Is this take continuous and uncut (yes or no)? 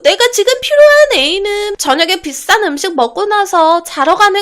no